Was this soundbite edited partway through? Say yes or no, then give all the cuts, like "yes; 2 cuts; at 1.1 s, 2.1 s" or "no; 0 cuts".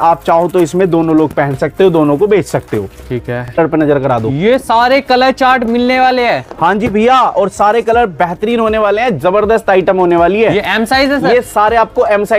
yes; 1 cut; at 3.5 s